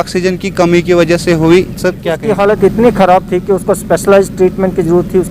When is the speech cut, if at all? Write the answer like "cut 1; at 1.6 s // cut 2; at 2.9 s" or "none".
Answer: cut 1; at 2.2 s